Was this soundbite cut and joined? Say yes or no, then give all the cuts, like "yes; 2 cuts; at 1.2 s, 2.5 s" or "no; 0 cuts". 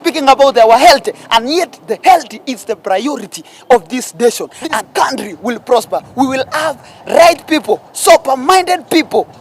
yes; 1 cut; at 4.8 s